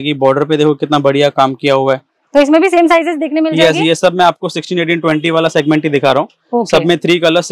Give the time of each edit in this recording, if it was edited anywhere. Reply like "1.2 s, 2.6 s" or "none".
none